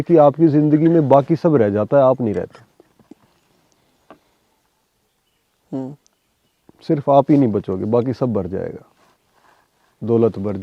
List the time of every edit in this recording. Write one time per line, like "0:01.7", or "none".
none